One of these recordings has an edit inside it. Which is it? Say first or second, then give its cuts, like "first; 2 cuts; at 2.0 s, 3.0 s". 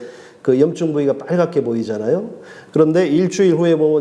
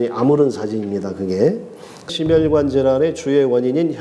second; 1 cut; at 2.0 s